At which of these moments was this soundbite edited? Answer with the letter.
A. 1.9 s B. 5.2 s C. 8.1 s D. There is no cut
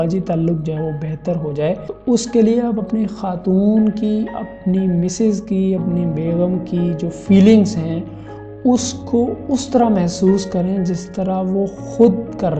A